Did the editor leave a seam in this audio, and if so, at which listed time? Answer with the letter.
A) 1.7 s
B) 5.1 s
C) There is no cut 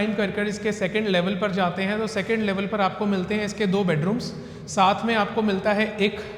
C